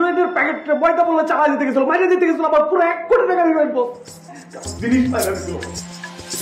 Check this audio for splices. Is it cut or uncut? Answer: uncut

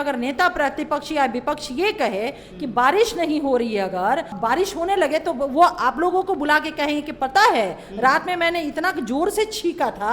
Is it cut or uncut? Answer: cut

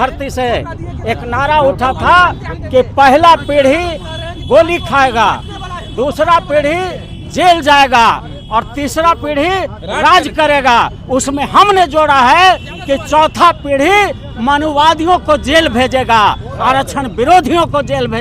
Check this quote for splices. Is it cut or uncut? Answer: uncut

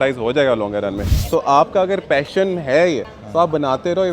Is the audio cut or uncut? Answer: cut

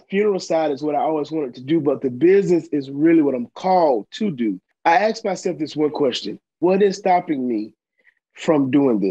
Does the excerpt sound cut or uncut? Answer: cut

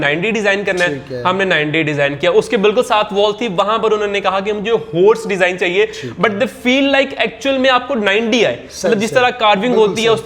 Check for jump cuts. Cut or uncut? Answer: uncut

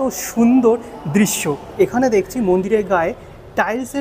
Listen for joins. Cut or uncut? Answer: cut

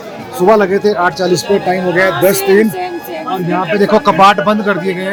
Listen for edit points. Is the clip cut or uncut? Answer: uncut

